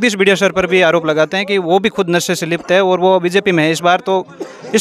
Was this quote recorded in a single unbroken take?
yes; 0 cuts

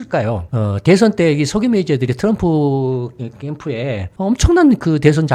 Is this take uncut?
yes; 0 cuts

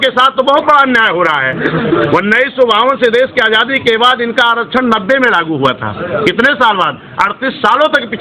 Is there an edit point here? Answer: no; 0 cuts

